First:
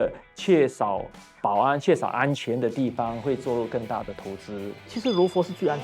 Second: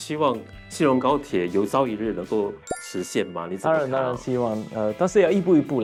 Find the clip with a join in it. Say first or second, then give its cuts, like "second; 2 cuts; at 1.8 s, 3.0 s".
first; 1 cut; at 4.9 s